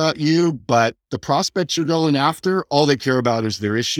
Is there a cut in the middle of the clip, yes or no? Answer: no